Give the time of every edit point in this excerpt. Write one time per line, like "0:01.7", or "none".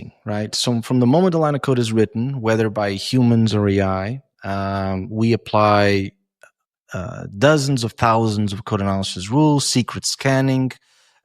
none

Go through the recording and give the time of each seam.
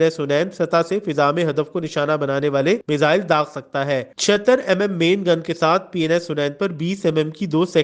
none

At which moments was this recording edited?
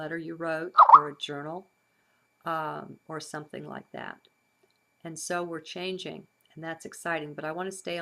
0:04.7

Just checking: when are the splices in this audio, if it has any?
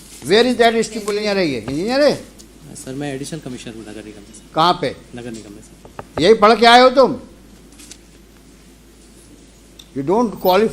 0:01.1

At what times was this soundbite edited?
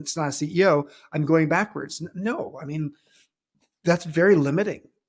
none

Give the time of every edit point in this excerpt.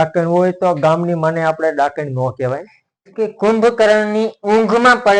0:03.1

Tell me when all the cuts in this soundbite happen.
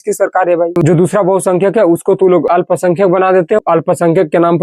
0:00.8
0:02.5
0:03.6

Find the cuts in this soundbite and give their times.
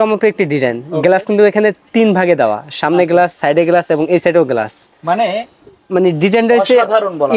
none

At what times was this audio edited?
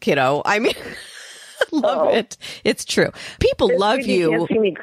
0:01.7
0:03.4

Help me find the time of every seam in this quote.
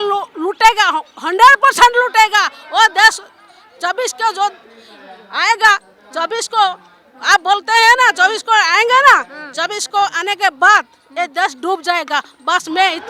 none

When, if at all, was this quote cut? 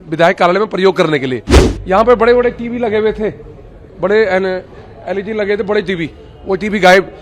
0:01.6

